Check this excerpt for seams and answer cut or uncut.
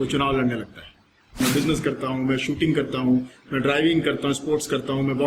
cut